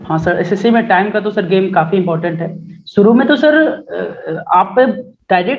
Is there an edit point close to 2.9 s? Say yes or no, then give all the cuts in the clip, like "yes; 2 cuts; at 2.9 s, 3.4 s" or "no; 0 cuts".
no; 0 cuts